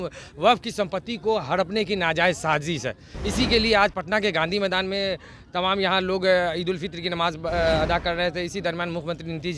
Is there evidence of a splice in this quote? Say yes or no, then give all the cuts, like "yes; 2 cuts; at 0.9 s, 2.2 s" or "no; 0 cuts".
no; 0 cuts